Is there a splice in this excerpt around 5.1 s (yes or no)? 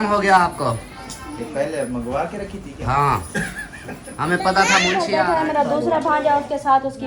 yes